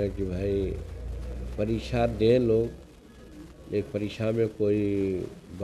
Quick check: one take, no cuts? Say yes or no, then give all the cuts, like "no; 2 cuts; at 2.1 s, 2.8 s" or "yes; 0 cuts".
yes; 0 cuts